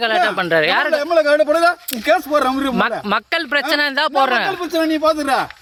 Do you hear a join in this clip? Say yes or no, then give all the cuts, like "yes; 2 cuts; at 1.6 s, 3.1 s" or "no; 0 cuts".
no; 0 cuts